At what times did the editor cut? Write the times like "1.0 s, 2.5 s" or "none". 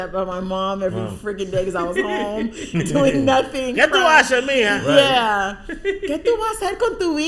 none